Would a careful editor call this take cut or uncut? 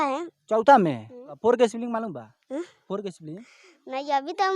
cut